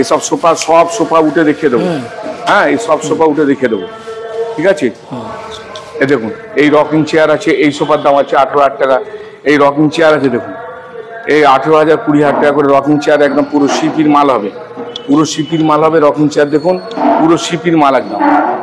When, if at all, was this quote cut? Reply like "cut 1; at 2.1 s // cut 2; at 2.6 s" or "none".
none

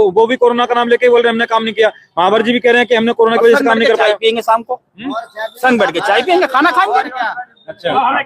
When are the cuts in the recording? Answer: none

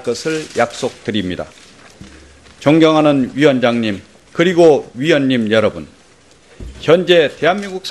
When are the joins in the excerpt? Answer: cut 1; at 5.9 s

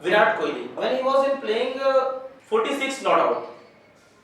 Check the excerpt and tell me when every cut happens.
cut 1; at 0.8 s // cut 2; at 2.3 s

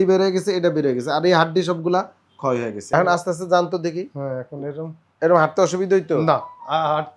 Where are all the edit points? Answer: cut 1; at 2.8 s

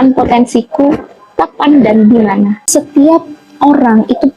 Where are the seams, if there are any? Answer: cut 1; at 2.6 s

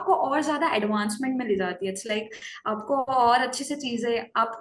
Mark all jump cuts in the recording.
none

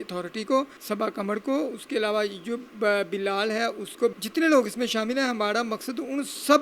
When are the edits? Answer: cut 1; at 4.1 s

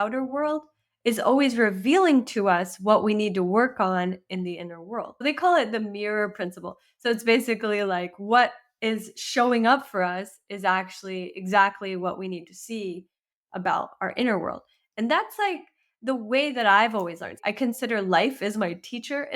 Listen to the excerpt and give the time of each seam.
cut 1; at 5.2 s // cut 2; at 17.3 s

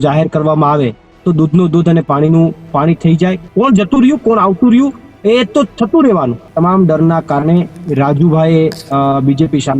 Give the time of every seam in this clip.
cut 1; at 3.4 s // cut 2; at 6.4 s

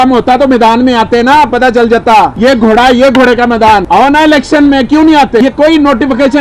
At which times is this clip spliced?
cut 1; at 2.3 s // cut 2; at 3.8 s // cut 3; at 5.4 s

